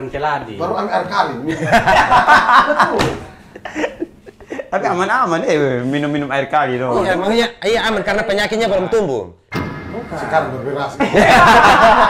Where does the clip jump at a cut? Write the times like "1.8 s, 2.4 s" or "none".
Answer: none